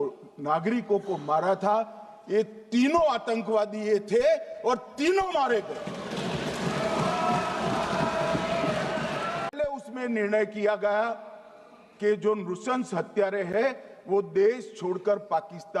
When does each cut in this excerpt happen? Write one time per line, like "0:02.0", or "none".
0:09.5